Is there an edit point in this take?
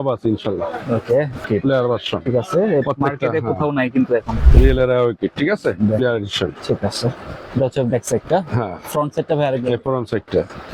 yes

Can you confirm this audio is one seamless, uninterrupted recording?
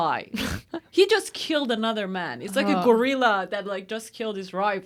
yes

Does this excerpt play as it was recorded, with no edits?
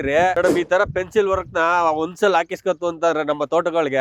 yes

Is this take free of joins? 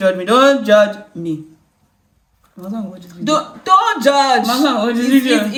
yes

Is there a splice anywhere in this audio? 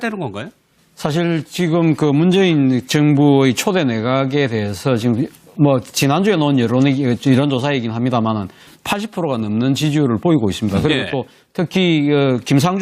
yes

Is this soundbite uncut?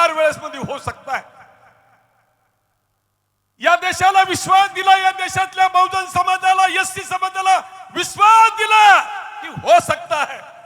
yes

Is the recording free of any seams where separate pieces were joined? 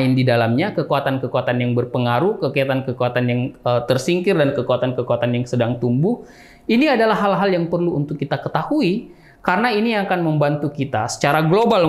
yes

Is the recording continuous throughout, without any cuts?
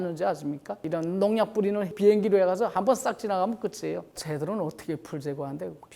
no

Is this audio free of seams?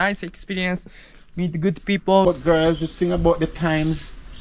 no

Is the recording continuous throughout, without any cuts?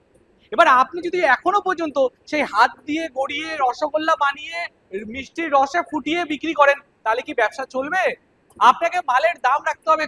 yes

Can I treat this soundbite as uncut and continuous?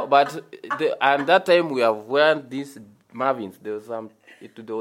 yes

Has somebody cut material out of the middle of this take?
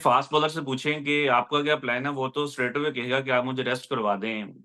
no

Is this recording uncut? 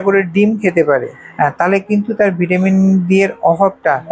yes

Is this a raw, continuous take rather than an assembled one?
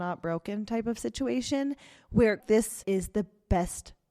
no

